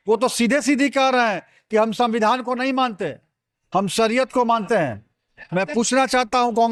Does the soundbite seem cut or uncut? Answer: uncut